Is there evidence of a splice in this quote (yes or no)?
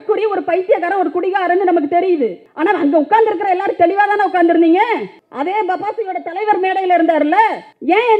no